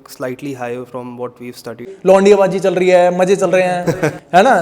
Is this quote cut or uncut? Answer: cut